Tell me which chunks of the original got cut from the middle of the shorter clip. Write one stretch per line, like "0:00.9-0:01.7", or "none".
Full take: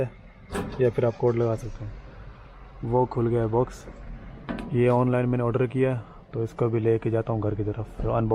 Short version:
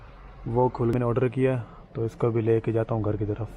0:03.3-0:05.3

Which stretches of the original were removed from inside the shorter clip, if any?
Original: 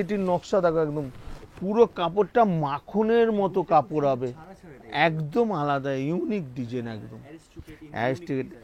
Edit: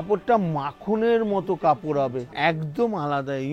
0:04.3-0:04.8

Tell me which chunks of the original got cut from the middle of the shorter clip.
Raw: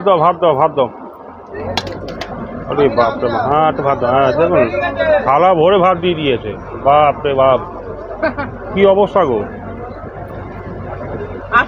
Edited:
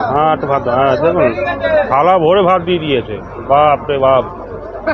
none

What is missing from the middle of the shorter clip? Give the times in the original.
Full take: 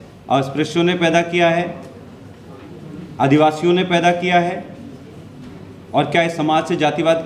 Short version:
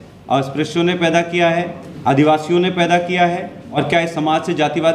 0:01.8-0:03.0
0:04.9-0:06.0

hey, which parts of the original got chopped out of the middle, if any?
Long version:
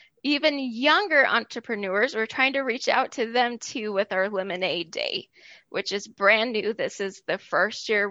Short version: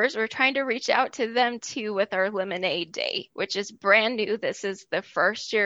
0:05.2-0:05.6

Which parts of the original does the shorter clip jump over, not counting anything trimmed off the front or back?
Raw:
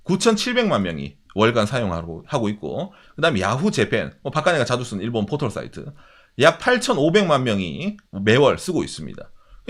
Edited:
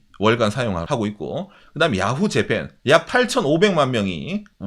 0:02.0-0:02.3
0:04.1-0:06.2

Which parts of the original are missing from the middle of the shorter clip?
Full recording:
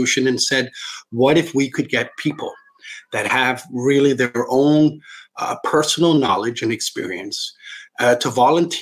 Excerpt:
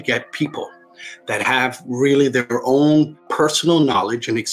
0:05.1-0:05.6

